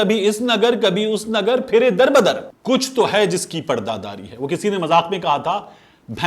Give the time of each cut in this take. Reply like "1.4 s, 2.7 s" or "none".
2.5 s